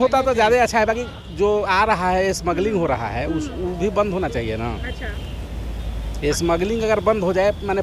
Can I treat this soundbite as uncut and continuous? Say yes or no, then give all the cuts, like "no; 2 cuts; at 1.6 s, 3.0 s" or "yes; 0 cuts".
yes; 0 cuts